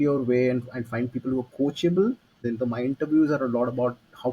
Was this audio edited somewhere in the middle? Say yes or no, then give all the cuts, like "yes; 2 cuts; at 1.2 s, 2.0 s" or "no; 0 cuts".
yes; 1 cut; at 2.3 s